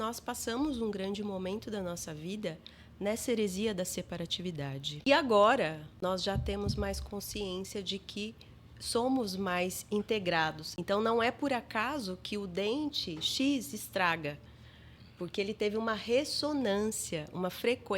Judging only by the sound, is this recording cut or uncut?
cut